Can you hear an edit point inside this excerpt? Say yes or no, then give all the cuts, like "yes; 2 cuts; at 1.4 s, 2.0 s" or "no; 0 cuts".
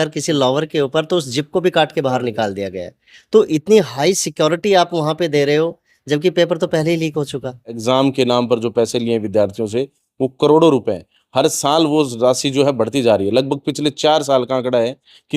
yes; 1 cut; at 7.7 s